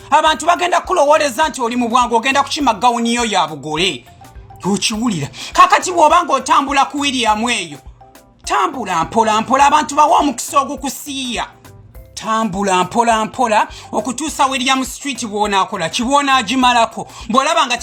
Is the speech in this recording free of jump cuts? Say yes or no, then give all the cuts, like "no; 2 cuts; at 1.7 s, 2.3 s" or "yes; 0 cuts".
yes; 0 cuts